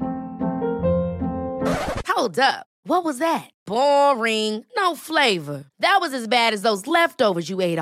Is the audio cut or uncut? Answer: uncut